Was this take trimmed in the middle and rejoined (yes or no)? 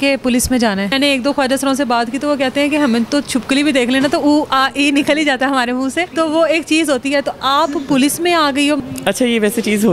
yes